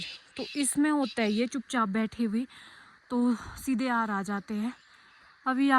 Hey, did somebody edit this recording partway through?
no; 0 cuts

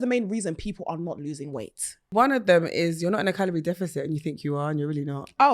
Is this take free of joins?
no; 1 cut; at 2.1 s

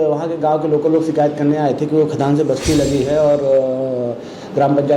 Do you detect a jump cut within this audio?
no; 0 cuts

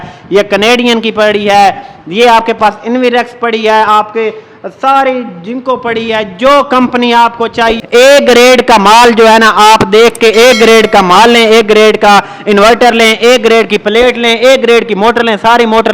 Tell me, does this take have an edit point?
yes; 1 cut; at 7.8 s

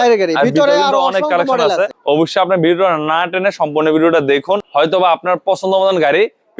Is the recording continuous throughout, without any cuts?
no; 2 cuts; at 2.0 s, 4.7 s

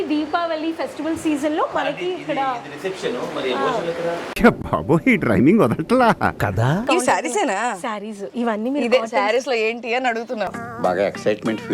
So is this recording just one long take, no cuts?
no; 1 cut; at 6.8 s

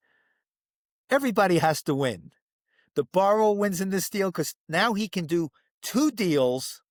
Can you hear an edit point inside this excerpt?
no; 0 cuts

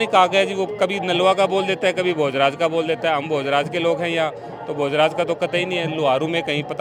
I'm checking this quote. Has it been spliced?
no; 0 cuts

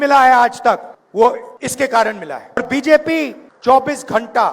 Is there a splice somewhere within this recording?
yes; 4 cuts; at 1.0 s, 1.5 s, 2.6 s, 3.4 s

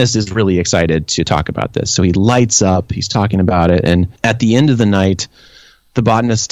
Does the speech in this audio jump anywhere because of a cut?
yes; 1 cut; at 4.1 s

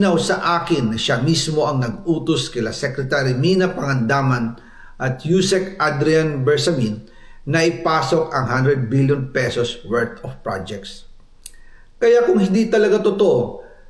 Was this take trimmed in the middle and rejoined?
no; 0 cuts

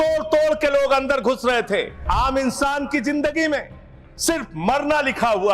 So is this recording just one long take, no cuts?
no; 1 cut; at 2.0 s

